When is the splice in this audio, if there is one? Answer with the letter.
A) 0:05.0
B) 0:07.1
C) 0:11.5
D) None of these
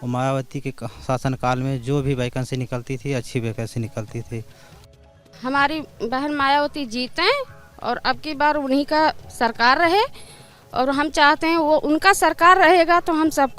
A